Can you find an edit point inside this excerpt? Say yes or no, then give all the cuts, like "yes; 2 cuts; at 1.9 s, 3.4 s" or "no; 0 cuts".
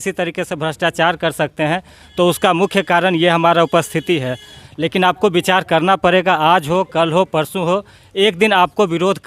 yes; 1 cut; at 4.6 s